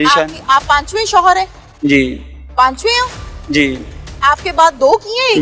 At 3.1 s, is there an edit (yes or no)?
no